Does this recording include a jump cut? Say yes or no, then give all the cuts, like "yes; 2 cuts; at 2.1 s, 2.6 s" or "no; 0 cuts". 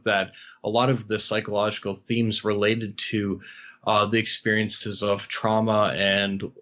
no; 0 cuts